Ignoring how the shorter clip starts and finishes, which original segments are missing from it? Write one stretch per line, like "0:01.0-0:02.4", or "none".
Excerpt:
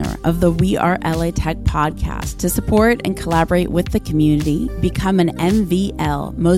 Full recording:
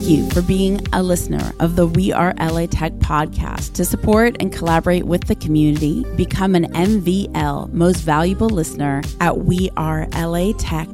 none